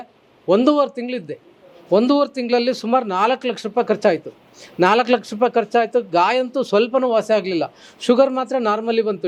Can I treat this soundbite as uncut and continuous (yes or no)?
yes